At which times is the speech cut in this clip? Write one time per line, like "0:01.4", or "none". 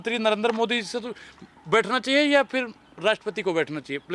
none

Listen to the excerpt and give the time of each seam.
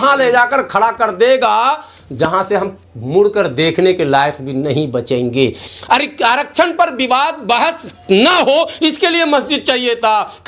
0:05.6

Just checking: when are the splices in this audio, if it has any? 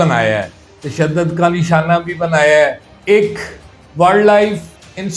0:02.9

